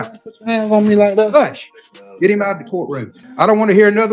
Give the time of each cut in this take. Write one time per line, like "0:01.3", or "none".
0:03.2